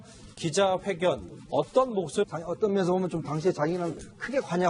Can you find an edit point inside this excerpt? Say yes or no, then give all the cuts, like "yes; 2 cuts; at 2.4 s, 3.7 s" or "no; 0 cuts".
no; 0 cuts